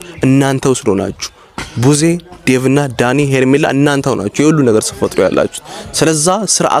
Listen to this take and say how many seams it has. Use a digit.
0